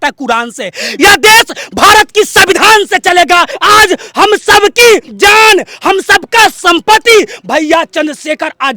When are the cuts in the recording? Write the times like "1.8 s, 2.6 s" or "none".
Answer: 3.5 s, 5.1 s